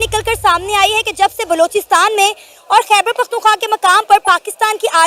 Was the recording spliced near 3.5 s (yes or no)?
no